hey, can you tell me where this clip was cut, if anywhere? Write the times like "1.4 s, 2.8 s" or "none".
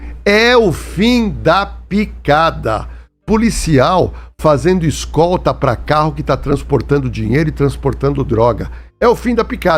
none